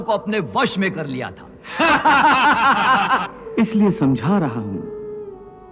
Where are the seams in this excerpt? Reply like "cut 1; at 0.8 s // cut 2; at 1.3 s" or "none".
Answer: cut 1; at 3.4 s